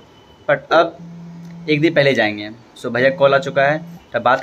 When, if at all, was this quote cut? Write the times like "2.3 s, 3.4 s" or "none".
none